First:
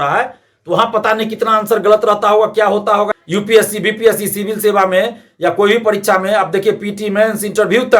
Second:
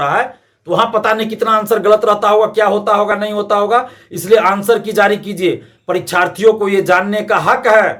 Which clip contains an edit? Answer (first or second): first